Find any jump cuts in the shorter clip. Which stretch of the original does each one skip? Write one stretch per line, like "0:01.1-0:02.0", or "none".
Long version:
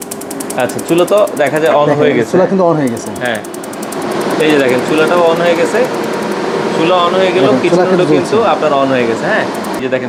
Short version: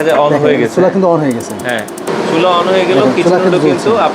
0:03.6-0:06.5